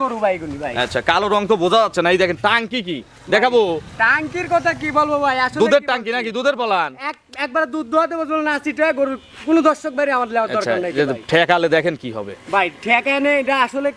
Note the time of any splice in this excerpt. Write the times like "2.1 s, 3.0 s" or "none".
none